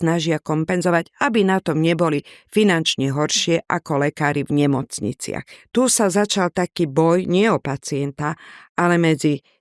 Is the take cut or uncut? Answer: cut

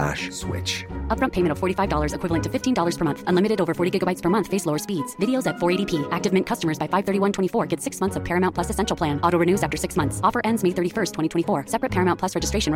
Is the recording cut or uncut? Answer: uncut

